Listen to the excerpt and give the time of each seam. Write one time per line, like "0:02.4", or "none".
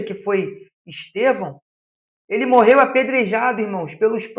none